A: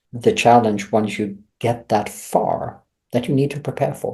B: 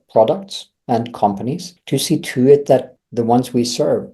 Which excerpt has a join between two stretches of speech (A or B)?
B